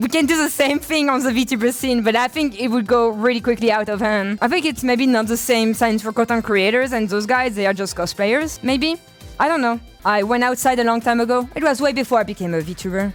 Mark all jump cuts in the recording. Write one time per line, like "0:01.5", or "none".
none